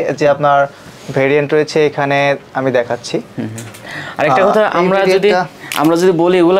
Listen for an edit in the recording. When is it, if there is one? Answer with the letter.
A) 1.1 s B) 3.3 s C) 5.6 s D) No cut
D